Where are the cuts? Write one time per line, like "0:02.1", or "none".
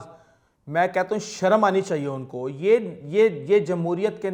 none